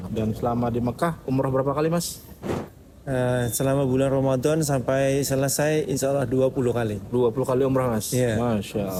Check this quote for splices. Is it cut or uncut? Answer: uncut